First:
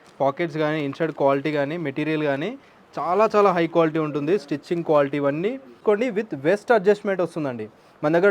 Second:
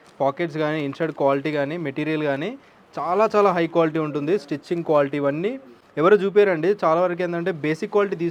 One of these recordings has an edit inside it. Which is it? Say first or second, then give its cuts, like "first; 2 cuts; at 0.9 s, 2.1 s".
first; 1 cut; at 5.8 s